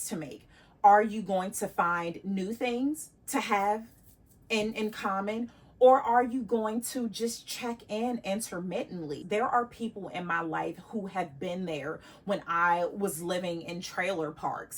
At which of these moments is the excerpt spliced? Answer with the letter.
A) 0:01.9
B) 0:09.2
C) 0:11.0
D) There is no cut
B